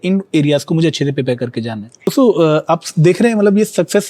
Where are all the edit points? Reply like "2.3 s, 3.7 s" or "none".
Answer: 2.1 s